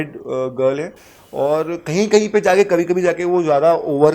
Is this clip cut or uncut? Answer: uncut